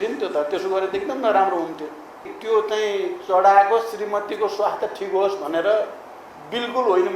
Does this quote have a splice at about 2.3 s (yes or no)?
yes